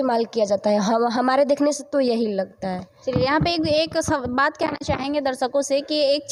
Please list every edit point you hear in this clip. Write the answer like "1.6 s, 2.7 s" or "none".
none